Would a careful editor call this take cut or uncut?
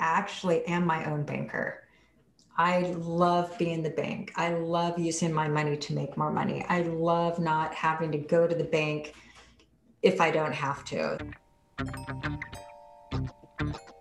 cut